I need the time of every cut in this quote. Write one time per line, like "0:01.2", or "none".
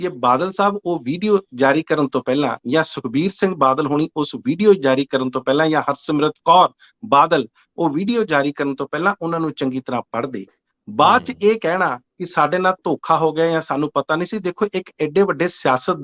none